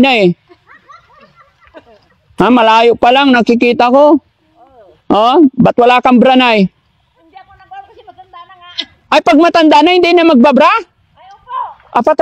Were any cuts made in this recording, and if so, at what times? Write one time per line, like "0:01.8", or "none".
none